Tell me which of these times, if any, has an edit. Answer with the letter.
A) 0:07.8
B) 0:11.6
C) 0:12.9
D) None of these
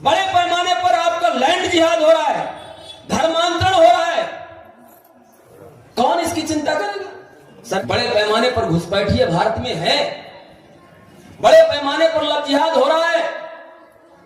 A